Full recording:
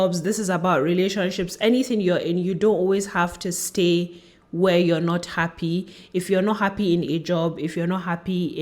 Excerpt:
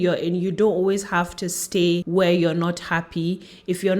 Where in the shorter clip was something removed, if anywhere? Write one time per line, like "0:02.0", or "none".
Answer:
0:02.0